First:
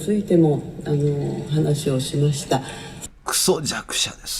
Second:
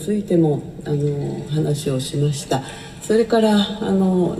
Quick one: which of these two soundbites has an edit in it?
first; 1 cut; at 2.9 s

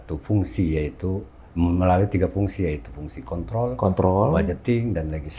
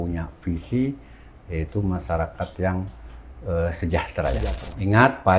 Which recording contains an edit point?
second; 1 cut; at 4.4 s

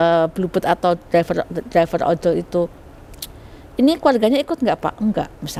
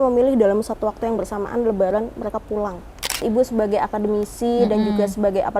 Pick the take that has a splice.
second; 1 cut; at 3.2 s

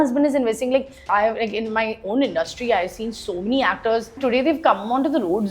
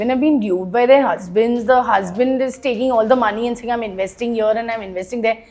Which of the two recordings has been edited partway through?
first; 2 cuts; at 1.1 s, 4.2 s

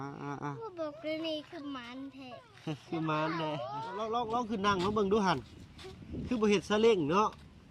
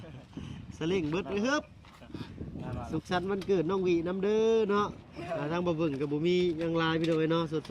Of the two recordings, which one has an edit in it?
first; 1 cut; at 3.9 s

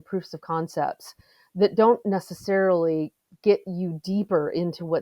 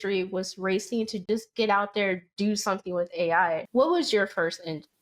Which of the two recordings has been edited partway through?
second; 2 cuts; at 1.3 s, 3.7 s

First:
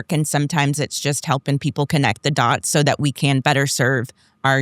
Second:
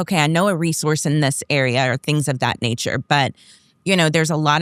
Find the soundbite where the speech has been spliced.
first; 1 cut; at 3.4 s

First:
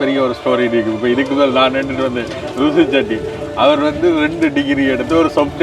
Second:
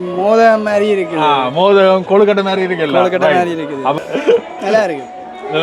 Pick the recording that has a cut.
second; 1 cut; at 4.0 s

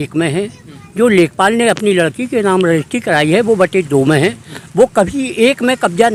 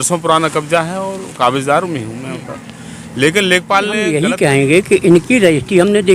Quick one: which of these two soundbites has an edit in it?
second; 1 cut; at 4.0 s

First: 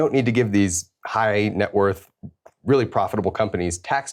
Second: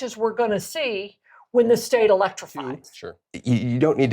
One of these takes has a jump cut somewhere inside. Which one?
second; 1 cut; at 2.9 s

